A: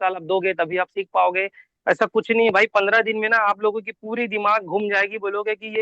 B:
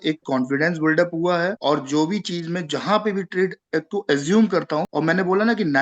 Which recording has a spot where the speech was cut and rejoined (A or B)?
B